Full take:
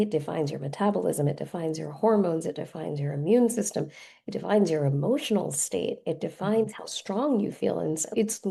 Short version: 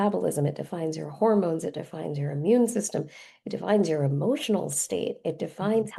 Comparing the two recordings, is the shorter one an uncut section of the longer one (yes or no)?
yes